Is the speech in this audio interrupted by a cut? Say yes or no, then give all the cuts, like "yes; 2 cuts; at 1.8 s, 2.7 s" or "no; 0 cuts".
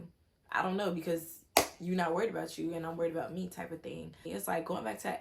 yes; 1 cut; at 4.2 s